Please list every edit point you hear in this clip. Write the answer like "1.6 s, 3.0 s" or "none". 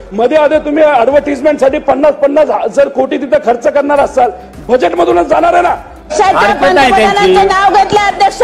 6.1 s

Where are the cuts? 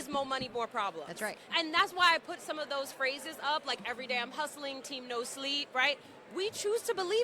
none

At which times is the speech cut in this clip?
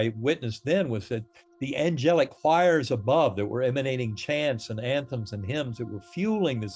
none

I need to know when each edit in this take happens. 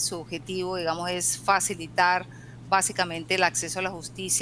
none

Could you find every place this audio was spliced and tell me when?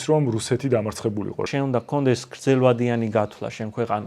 1.4 s

